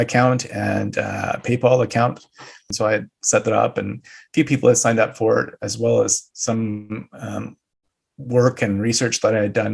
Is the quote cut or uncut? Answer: cut